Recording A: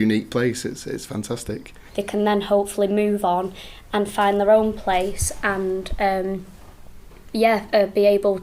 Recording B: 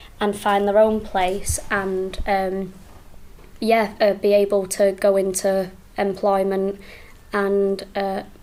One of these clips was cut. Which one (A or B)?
A